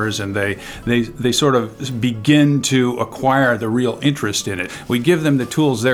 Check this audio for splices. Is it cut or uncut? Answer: cut